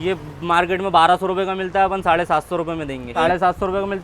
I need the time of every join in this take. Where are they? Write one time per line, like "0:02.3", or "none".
0:03.1